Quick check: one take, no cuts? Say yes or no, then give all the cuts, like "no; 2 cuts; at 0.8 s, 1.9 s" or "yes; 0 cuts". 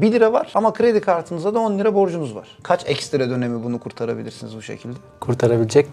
yes; 0 cuts